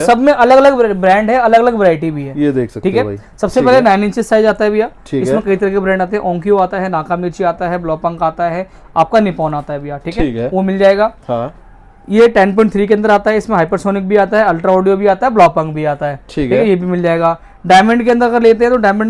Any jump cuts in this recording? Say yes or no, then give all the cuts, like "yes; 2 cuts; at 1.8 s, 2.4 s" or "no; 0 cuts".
no; 0 cuts